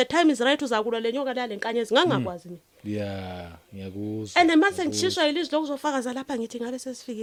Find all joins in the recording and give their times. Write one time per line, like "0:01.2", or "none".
none